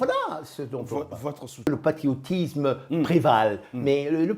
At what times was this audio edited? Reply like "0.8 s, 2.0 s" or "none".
1.7 s